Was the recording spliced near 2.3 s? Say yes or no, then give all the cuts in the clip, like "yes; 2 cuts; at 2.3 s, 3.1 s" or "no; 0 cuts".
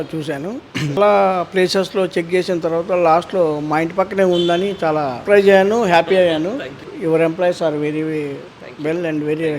no; 3 cuts; at 1.0 s, 5.2 s, 6.9 s